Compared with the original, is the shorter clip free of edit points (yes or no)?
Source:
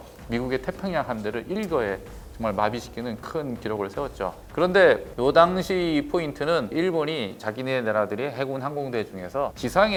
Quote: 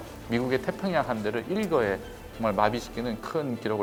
yes